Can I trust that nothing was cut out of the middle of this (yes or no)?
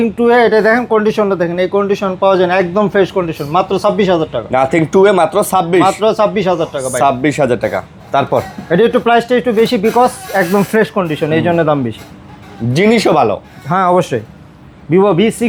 yes